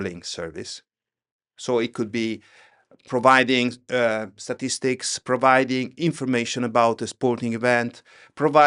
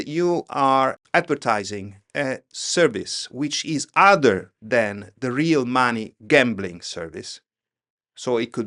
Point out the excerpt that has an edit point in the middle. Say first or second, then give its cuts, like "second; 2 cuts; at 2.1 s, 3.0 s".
second; 1 cut; at 1.0 s